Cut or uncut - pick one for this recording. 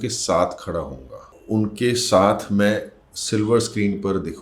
cut